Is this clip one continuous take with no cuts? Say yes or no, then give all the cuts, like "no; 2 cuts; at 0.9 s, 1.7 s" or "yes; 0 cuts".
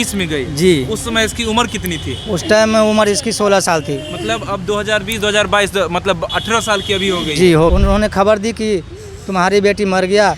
no; 1 cut; at 7.7 s